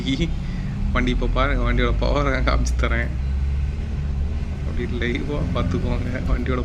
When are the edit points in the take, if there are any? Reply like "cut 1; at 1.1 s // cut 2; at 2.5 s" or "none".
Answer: none